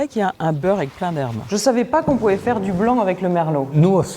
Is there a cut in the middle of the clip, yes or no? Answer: yes